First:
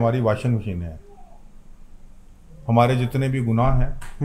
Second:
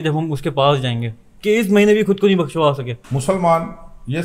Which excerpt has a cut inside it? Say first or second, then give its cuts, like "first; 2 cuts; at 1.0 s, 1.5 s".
second; 1 cut; at 2.9 s